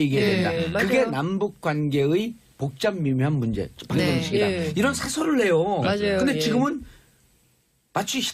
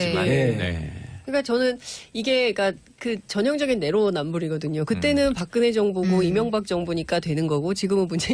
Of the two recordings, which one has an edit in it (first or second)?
first